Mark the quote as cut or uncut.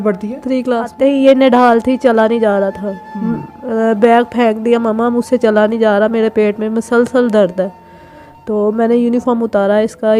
cut